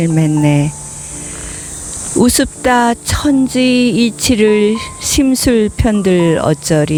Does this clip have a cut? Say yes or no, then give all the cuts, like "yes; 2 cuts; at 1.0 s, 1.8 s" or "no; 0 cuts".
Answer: no; 0 cuts